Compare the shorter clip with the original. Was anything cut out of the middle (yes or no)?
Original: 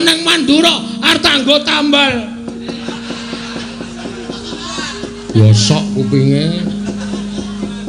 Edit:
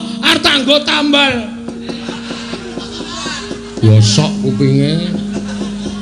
yes